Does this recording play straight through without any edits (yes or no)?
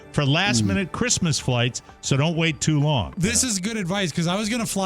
no